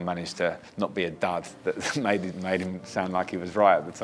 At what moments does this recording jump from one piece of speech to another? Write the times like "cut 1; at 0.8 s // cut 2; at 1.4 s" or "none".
none